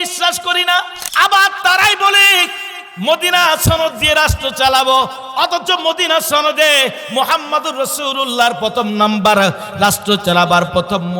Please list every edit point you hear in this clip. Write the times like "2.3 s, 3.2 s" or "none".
1.0 s